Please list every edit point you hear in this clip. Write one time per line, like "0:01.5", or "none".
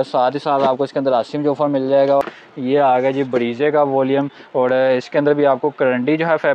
0:02.2